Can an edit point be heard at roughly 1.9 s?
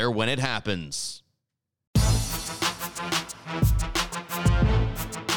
yes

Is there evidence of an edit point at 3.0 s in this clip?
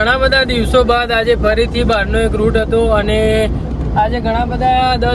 no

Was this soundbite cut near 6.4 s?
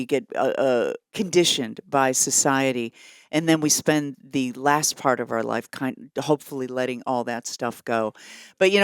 no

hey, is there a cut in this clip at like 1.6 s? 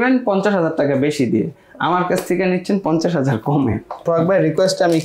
no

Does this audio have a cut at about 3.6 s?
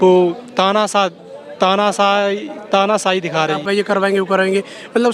yes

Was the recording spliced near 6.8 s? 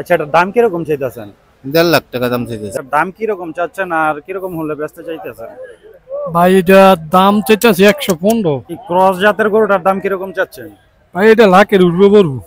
no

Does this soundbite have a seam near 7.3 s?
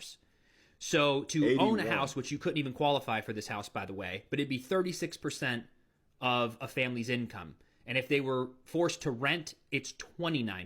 no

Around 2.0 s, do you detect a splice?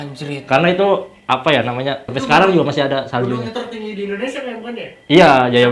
yes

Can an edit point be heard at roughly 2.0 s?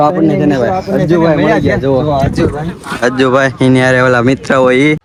no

